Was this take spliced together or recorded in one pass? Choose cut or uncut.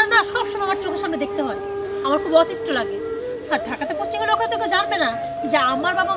uncut